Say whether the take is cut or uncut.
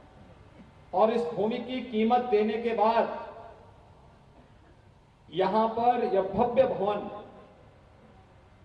uncut